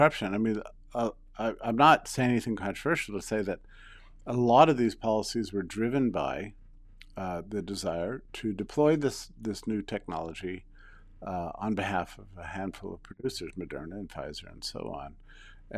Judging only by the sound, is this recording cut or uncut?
uncut